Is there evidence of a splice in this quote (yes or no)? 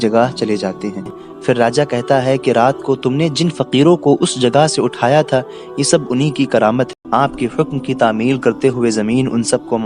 yes